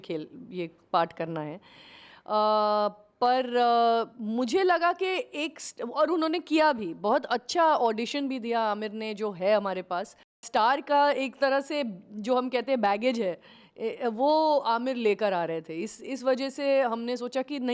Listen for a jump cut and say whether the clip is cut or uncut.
cut